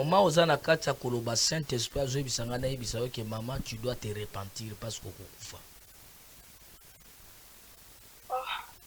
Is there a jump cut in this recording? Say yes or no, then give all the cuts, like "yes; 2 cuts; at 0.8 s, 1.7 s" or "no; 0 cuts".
no; 0 cuts